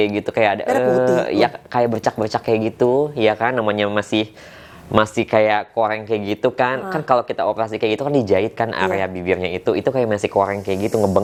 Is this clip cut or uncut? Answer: uncut